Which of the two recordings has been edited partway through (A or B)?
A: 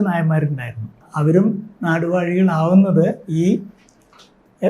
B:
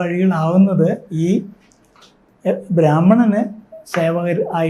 A